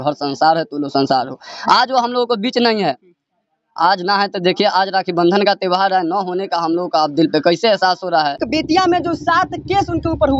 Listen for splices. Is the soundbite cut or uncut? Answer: cut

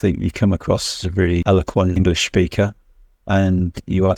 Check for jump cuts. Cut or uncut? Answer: cut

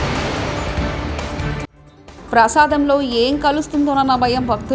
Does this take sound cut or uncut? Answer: cut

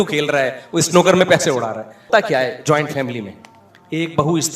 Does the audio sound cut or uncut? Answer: cut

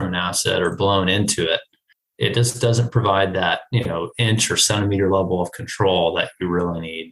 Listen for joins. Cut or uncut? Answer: uncut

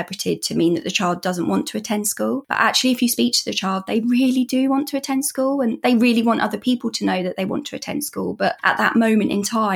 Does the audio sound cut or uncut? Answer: uncut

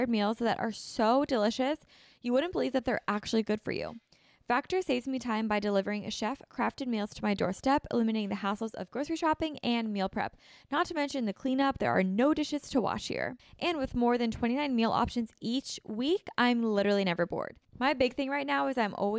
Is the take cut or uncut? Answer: cut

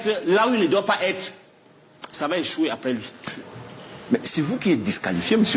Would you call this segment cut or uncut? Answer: cut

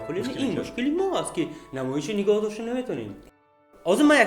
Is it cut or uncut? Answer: cut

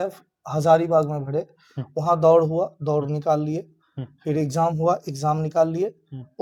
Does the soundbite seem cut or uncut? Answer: uncut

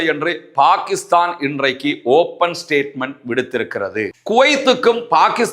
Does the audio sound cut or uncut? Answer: cut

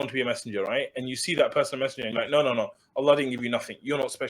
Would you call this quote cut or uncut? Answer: uncut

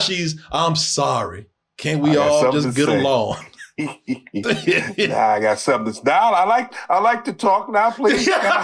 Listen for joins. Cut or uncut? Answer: uncut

